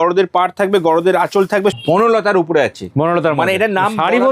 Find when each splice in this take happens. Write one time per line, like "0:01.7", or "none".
0:01.8

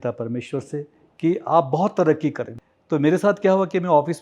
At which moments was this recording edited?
0:02.5

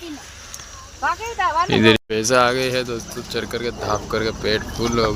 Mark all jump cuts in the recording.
0:02.0

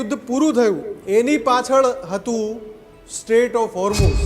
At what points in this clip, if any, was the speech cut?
0:00.9

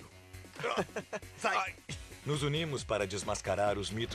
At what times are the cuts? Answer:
0:02.6

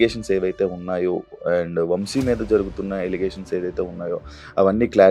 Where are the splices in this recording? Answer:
none

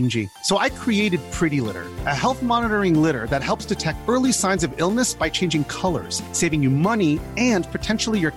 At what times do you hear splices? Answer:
none

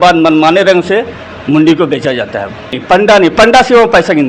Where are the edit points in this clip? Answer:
0:02.8

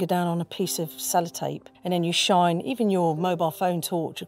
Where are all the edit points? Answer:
0:01.7

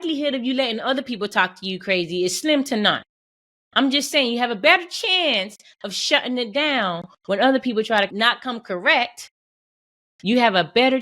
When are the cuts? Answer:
0:08.1

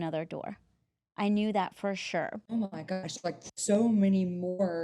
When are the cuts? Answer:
0:02.4

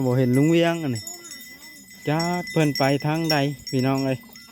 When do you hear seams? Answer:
none

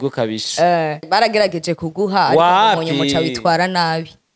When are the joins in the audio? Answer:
0:01.0

